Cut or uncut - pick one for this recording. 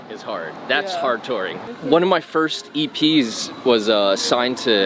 cut